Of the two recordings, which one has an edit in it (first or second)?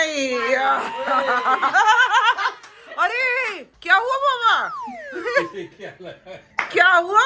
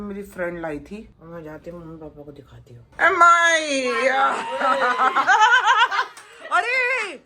second